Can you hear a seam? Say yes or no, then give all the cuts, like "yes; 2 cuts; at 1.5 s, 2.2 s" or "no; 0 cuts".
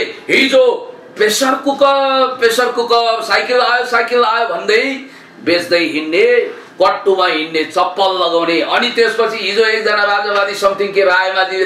no; 0 cuts